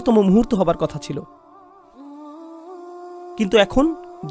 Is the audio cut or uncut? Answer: cut